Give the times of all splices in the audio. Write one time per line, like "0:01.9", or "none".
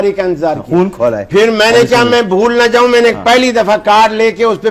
none